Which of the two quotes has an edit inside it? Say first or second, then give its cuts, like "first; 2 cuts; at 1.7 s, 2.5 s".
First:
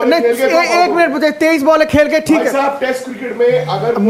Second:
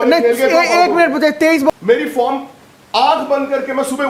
second; 1 cut; at 1.7 s